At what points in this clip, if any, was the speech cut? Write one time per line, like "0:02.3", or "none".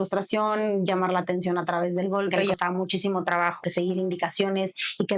0:02.5
0:03.6